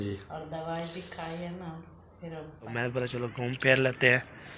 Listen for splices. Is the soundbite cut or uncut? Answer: cut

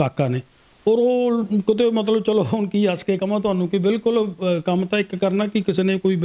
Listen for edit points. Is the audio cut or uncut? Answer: uncut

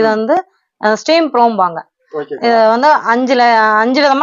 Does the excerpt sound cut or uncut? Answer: uncut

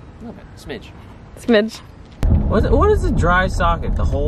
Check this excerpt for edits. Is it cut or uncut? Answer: cut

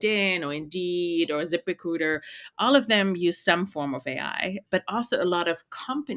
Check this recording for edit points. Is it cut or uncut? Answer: uncut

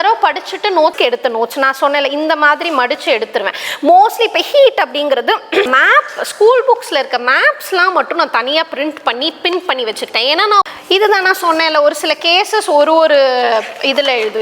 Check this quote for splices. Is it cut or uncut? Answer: cut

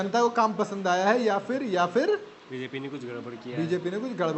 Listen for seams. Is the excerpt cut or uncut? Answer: uncut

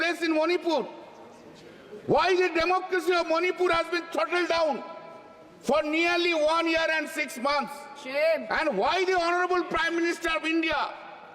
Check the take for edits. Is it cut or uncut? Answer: uncut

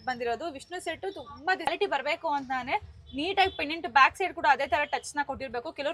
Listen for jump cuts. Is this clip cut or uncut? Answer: cut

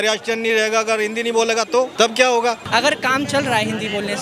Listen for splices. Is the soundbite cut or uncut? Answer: cut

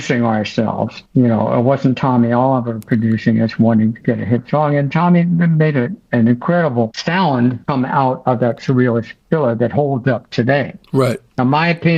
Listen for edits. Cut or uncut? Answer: uncut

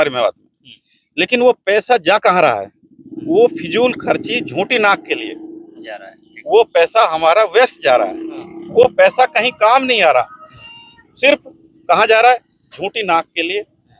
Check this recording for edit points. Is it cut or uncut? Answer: uncut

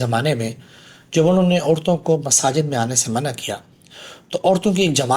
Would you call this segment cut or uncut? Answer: uncut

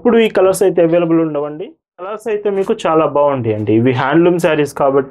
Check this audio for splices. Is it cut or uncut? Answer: cut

